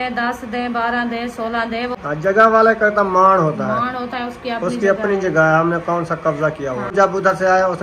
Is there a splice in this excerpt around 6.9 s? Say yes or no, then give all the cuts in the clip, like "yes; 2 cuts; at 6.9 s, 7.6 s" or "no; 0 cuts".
yes; 2 cuts; at 2.0 s, 6.9 s